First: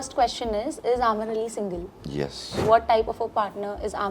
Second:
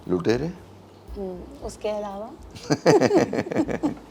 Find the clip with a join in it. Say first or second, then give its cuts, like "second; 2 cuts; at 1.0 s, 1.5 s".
first; 1 cut; at 2.6 s